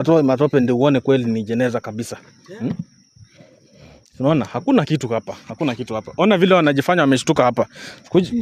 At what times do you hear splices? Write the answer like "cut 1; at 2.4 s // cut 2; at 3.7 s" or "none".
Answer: none